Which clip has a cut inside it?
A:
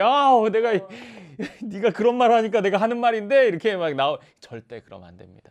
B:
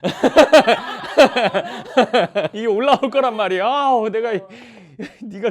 B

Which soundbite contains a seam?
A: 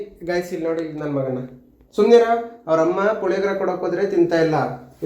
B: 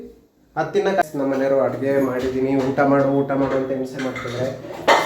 B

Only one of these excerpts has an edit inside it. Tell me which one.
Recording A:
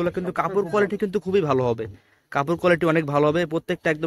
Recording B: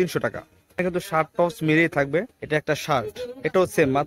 B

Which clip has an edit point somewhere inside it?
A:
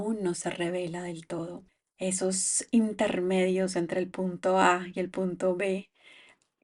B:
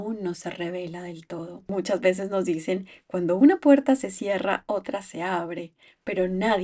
B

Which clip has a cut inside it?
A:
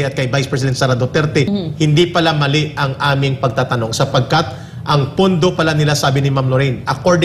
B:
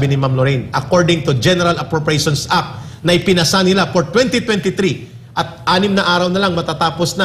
A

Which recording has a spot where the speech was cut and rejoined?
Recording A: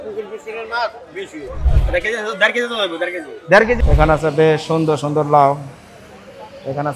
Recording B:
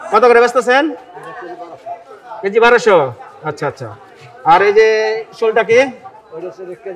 A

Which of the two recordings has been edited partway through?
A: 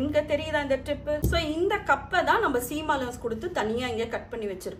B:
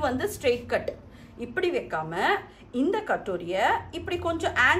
A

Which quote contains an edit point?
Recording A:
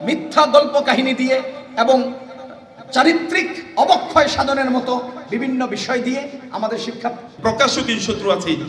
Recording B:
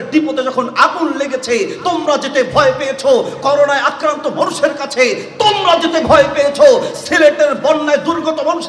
A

